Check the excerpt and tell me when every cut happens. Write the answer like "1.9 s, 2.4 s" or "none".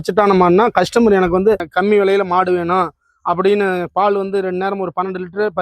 1.7 s